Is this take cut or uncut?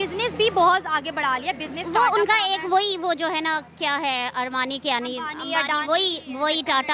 uncut